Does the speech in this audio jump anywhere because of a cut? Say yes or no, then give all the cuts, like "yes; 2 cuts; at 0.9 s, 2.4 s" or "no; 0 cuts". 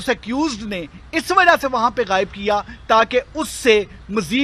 no; 0 cuts